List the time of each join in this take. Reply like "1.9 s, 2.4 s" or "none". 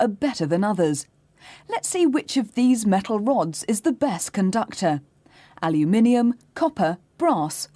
3.0 s